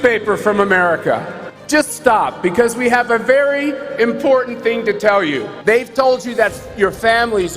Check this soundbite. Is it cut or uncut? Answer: cut